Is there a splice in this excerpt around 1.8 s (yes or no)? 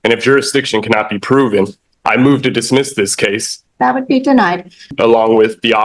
no